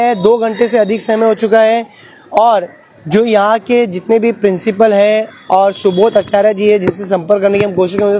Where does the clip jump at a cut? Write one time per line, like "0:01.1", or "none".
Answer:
none

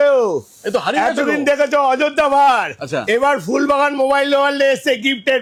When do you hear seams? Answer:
none

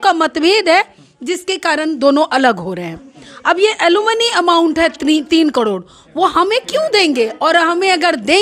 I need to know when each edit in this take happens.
none

